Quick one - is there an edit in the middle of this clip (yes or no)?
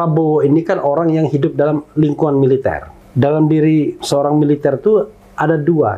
no